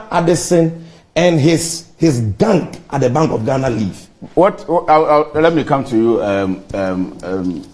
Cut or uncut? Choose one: uncut